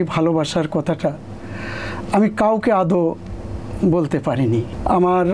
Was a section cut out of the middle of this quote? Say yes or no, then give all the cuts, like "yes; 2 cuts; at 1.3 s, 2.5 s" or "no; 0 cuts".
no; 0 cuts